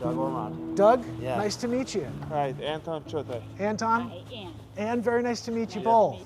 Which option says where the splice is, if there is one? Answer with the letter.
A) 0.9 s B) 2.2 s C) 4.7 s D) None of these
B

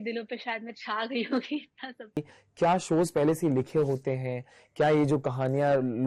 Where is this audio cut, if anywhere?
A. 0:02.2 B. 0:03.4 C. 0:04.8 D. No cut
A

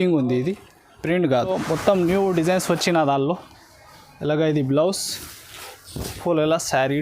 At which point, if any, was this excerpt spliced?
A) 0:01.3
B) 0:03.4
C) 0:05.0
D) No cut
A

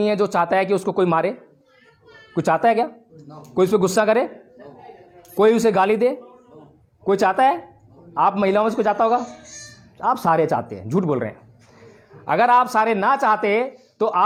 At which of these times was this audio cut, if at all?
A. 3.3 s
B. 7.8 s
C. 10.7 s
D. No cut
D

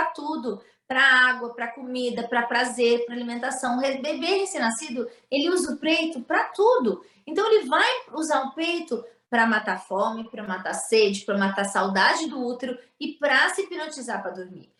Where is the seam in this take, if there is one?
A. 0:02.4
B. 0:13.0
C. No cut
C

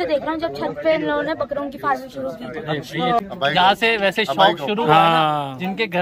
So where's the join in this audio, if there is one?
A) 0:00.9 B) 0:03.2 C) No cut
B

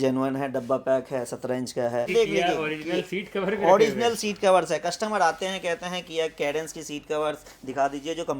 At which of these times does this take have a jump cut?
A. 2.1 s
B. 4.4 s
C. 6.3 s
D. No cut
A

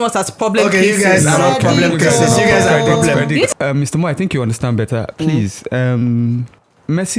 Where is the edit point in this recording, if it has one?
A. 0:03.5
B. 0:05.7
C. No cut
A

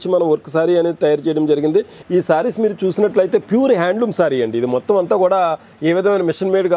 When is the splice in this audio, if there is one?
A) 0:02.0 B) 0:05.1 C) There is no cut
A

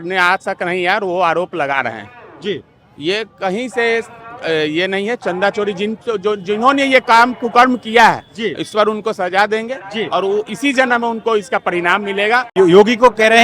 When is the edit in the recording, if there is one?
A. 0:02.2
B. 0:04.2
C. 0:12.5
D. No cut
C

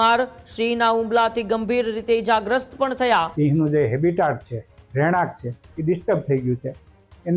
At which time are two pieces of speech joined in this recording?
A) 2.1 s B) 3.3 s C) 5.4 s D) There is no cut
B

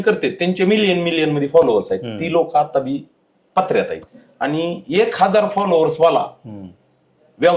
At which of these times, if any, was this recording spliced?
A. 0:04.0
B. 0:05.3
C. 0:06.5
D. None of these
A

